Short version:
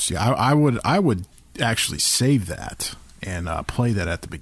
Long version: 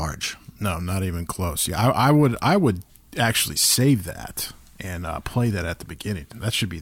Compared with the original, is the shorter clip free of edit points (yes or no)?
yes